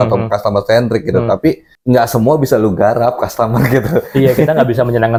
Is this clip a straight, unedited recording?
yes; 0 cuts

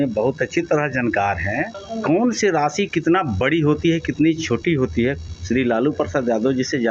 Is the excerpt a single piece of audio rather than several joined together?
no; 2 cuts; at 1.8 s, 5.3 s

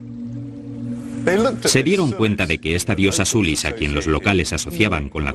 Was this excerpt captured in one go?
yes; 0 cuts

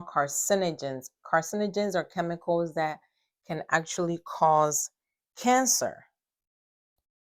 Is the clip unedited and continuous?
yes; 0 cuts

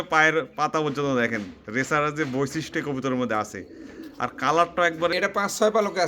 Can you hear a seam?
yes; 1 cut; at 5.1 s

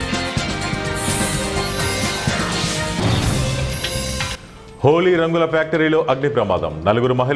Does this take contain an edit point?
no; 0 cuts

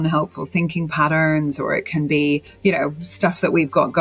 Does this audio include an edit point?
yes; 1 cut; at 2.5 s

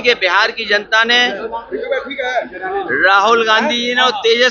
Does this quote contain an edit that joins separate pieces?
no; 0 cuts

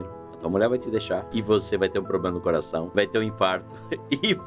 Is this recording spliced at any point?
yes; 2 cuts; at 1.3 s, 2.9 s

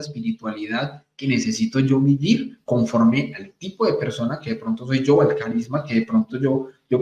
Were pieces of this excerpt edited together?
no; 0 cuts

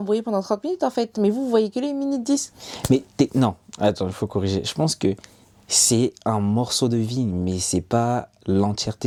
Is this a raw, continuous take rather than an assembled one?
yes; 0 cuts

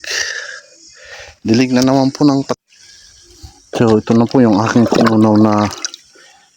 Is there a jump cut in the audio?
yes; 1 cut; at 2.6 s

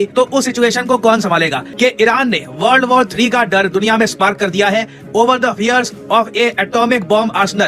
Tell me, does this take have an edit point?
yes; 1 cut; at 1.6 s

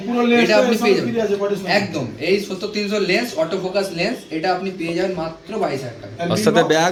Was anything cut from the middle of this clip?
no; 0 cuts

